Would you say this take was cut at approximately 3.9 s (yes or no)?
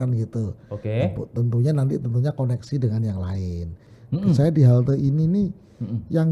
yes